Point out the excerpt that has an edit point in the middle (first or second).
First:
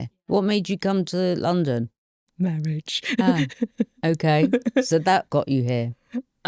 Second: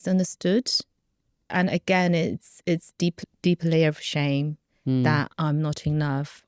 second